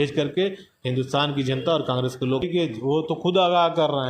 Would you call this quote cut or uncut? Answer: cut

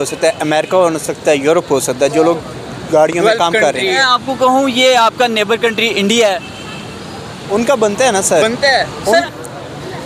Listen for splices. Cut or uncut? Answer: cut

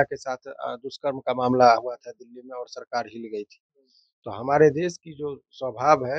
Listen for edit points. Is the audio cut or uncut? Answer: uncut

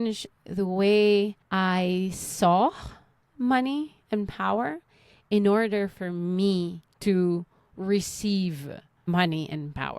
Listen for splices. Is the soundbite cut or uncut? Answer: cut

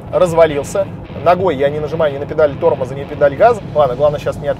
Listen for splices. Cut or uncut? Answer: cut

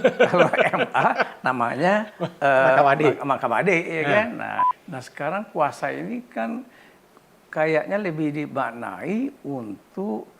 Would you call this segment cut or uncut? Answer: cut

